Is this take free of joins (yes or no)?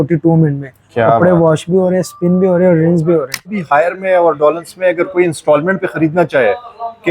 no